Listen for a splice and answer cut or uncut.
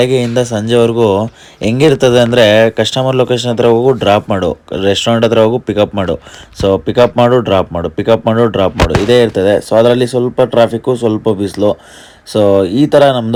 uncut